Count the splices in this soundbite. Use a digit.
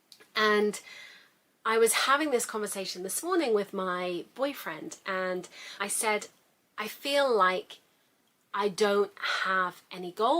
1